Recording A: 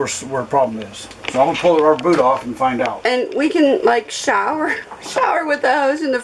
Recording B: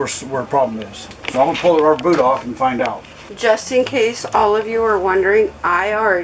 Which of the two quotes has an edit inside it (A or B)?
A